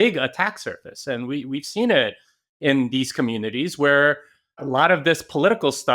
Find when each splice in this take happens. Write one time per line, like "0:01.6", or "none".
0:04.6